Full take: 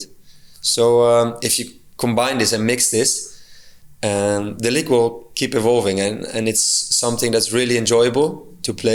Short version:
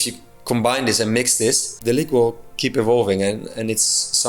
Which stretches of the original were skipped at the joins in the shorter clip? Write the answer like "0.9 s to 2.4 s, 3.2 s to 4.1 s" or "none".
3.3 s to 4.5 s